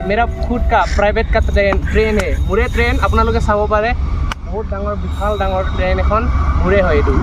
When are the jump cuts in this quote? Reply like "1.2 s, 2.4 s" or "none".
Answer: none